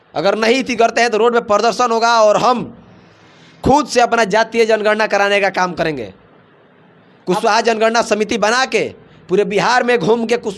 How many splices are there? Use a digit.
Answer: 0